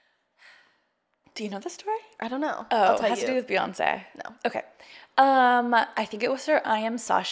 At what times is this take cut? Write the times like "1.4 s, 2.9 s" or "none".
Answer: none